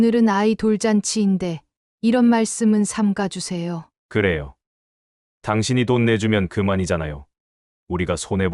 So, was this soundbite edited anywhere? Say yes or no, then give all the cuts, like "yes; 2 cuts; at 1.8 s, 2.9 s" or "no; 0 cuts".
no; 0 cuts